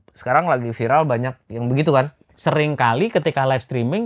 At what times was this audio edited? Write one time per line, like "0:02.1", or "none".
0:02.3